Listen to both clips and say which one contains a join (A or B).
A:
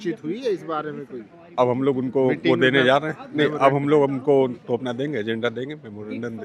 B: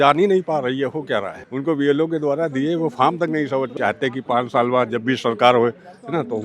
B